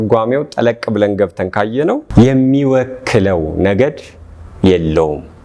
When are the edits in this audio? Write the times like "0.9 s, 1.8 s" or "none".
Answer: none